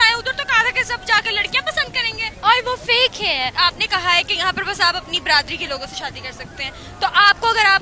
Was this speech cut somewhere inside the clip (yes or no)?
yes